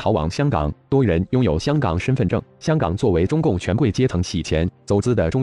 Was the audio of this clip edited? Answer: no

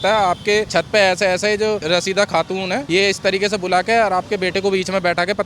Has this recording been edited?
no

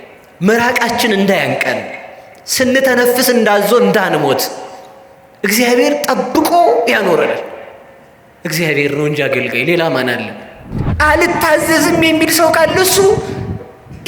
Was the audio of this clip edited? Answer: yes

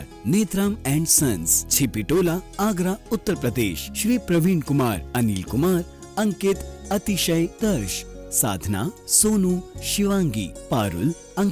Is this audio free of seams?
yes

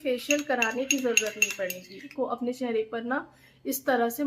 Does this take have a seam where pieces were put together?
yes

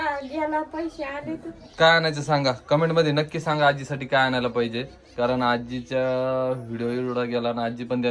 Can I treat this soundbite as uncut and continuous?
yes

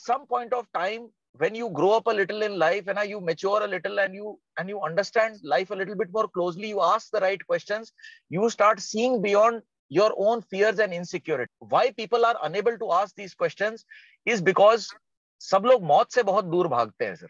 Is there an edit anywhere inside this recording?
yes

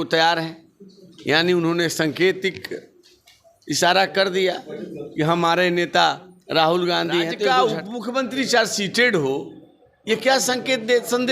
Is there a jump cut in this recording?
yes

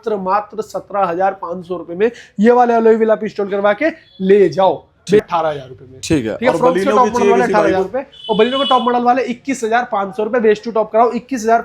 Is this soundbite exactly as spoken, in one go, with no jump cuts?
no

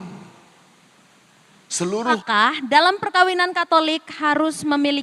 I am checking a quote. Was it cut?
yes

